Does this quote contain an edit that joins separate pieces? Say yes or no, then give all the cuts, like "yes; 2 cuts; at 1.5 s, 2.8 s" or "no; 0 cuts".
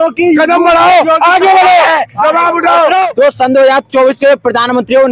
yes; 1 cut; at 3.1 s